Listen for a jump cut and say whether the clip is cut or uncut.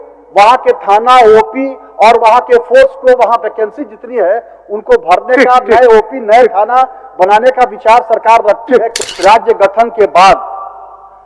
cut